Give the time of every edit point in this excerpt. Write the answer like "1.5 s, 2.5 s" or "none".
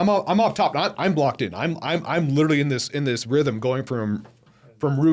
none